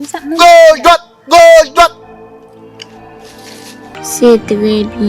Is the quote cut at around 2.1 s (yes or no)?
no